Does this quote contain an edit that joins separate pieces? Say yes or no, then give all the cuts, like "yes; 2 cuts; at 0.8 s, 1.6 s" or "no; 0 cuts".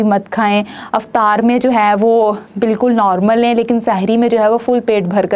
no; 0 cuts